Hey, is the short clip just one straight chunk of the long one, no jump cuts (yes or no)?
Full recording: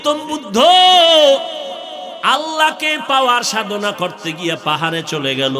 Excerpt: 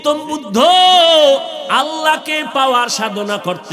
no